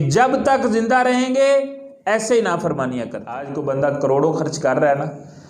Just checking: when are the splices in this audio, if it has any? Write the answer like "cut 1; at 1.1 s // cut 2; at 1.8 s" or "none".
cut 1; at 3.5 s